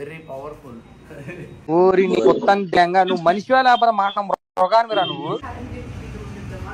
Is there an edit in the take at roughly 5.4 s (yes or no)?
yes